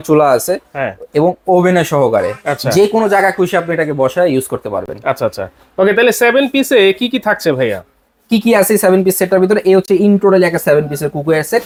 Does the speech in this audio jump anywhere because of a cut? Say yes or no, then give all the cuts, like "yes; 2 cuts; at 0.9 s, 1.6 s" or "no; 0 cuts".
no; 0 cuts